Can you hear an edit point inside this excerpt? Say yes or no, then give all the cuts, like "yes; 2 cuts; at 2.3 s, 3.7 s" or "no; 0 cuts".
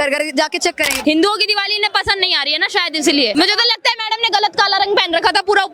yes; 2 cuts; at 0.9 s, 3.3 s